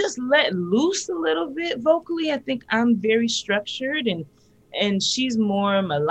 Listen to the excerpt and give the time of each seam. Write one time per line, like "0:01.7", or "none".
none